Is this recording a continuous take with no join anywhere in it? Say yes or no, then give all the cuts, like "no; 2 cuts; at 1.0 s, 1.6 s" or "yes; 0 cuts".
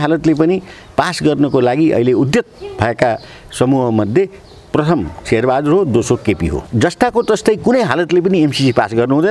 no; 1 cut; at 6.6 s